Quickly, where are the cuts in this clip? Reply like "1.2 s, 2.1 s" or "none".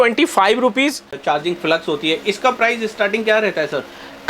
1.2 s